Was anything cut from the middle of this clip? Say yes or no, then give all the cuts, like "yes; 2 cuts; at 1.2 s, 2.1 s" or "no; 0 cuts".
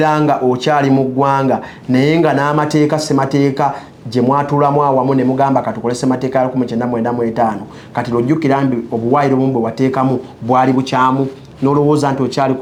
no; 0 cuts